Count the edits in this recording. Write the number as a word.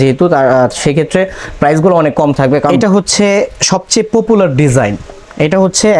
one